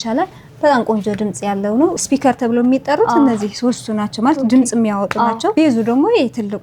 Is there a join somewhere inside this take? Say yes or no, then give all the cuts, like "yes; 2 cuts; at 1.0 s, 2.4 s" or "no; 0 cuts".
yes; 2 cuts; at 2.0 s, 5.5 s